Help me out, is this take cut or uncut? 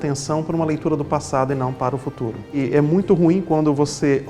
cut